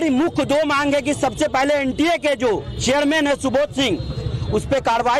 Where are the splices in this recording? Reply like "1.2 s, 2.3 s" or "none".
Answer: 2.7 s